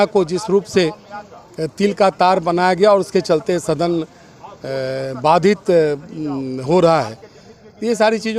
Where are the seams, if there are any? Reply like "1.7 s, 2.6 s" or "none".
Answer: none